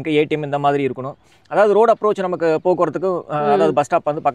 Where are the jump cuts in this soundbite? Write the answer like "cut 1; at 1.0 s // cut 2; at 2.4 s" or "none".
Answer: none